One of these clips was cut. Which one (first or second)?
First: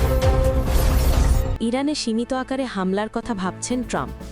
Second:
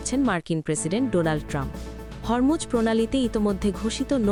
first